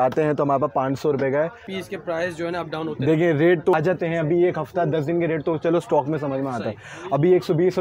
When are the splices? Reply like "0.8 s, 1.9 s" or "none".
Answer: 1.6 s, 3.7 s